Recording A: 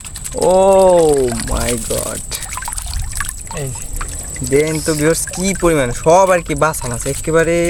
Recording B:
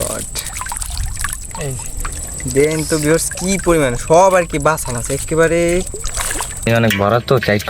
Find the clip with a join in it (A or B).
B